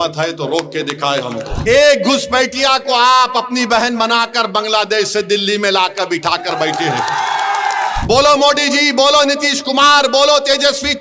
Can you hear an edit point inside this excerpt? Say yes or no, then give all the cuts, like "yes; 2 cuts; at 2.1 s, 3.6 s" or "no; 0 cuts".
yes; 2 cuts; at 1.5 s, 8.0 s